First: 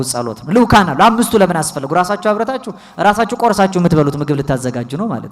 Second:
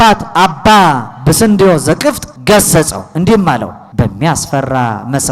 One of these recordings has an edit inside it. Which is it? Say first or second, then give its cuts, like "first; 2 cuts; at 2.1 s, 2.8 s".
second; 2 cuts; at 2.3 s, 3.8 s